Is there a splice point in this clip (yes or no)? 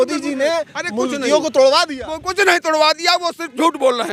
no